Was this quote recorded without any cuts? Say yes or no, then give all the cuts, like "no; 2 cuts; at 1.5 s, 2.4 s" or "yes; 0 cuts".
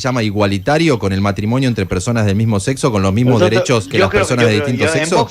no; 1 cut; at 3.9 s